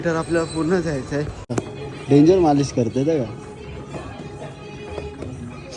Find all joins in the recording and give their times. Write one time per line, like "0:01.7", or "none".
0:01.6